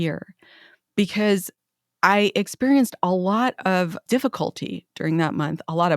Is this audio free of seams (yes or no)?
no